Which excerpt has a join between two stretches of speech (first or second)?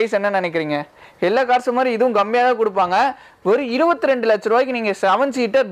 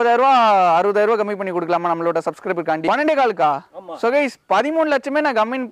second